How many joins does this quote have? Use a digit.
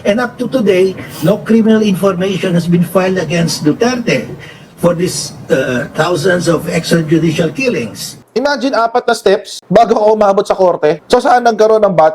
1